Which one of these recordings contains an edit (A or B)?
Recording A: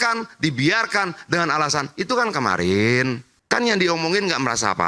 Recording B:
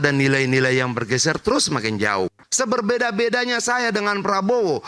B